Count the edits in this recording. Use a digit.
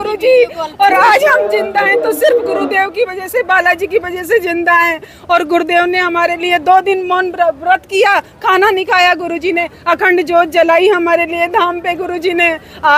0